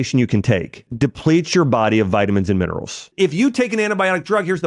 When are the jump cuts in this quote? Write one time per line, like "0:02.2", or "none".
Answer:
0:00.9
0:03.1